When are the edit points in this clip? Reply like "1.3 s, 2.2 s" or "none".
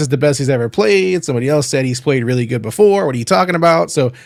none